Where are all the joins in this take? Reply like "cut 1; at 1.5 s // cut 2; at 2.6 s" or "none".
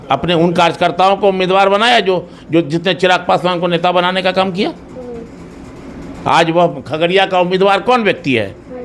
none